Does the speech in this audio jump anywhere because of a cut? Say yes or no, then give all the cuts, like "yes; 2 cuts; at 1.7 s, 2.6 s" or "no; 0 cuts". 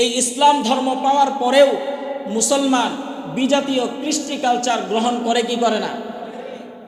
no; 0 cuts